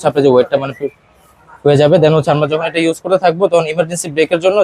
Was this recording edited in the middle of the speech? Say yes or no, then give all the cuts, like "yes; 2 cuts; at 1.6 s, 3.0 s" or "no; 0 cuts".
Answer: no; 0 cuts